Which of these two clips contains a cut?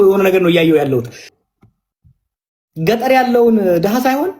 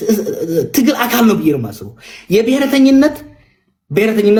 first; 1 cut; at 1.2 s

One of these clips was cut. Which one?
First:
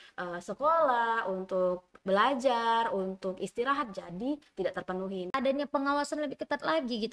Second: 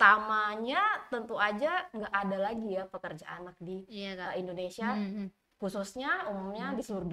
first; 1 cut; at 5.3 s

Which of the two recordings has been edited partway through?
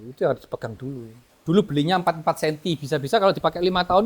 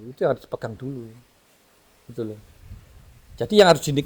first; 1 cut; at 1.3 s

